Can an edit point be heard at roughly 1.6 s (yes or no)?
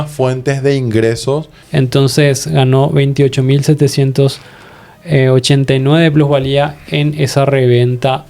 yes